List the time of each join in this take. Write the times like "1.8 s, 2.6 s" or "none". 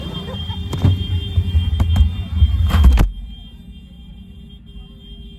none